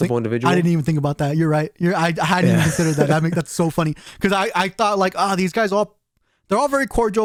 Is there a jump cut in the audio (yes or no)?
no